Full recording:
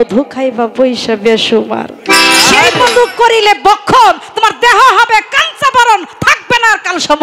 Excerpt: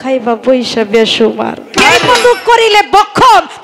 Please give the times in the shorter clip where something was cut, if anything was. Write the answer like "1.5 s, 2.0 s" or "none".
1.7 s